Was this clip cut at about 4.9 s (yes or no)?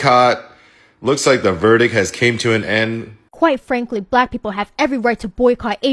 no